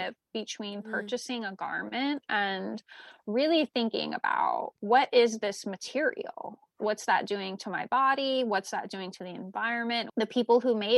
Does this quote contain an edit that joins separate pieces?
yes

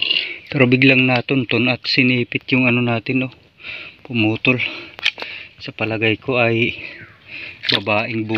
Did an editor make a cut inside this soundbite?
no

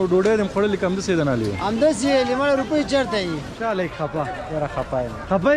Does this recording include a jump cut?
yes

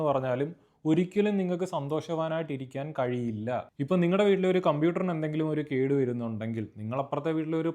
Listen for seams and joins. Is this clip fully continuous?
no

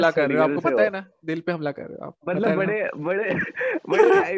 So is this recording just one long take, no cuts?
yes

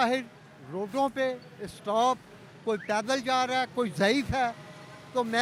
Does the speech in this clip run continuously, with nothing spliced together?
yes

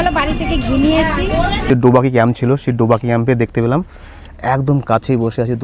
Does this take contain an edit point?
yes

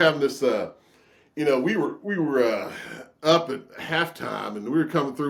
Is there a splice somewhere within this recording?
no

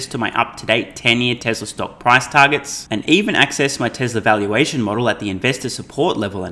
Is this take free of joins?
yes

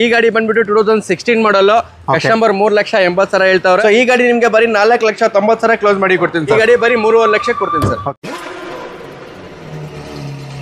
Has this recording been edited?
yes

